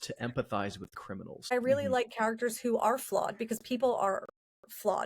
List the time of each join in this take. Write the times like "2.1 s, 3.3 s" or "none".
1.5 s